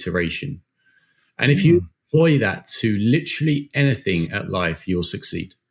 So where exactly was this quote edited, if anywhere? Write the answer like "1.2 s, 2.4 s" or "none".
none